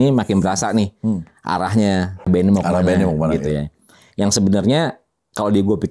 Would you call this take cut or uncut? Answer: cut